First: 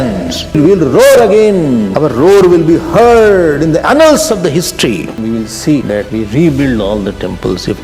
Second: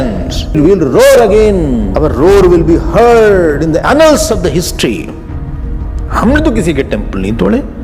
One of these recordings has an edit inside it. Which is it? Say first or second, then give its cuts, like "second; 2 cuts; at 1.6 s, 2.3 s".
first; 2 cuts; at 5.2 s, 6.0 s